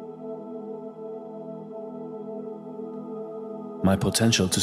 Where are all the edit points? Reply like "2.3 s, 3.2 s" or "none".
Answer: none